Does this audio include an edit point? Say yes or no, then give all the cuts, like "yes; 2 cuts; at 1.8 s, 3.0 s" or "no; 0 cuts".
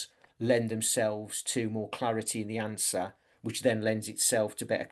no; 0 cuts